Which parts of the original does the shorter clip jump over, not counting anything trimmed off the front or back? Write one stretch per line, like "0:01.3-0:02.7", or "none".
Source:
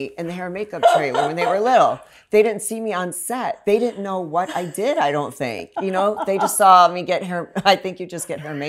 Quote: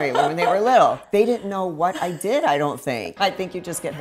0:02.0-0:03.6
0:05.6-0:07.5